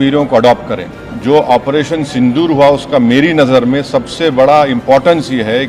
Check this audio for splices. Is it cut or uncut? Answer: cut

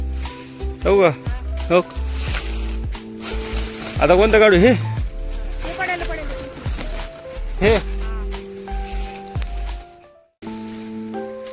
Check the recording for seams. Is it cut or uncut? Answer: cut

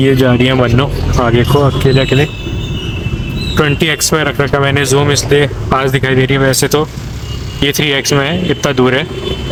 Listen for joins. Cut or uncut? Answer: uncut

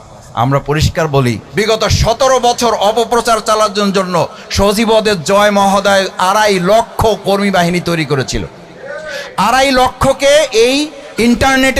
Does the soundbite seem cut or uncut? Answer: cut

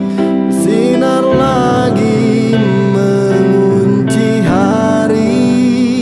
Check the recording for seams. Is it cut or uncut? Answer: uncut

